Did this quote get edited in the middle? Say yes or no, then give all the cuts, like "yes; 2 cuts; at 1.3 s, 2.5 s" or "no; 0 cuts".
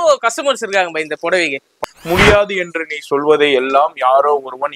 yes; 1 cut; at 1.8 s